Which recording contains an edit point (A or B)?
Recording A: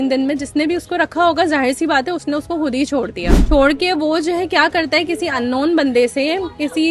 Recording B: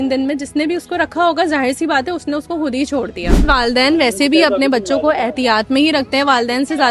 B